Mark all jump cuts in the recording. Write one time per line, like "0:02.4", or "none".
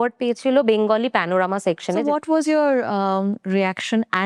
0:02.0